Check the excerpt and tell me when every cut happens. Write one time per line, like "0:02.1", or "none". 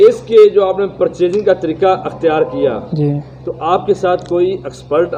none